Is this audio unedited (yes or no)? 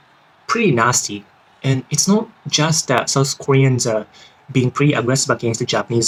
yes